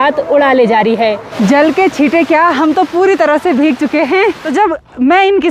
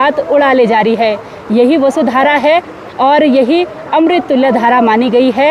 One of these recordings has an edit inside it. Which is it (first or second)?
first